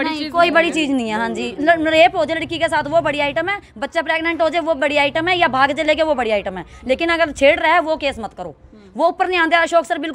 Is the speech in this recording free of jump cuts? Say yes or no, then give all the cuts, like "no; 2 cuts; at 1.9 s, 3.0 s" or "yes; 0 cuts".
yes; 0 cuts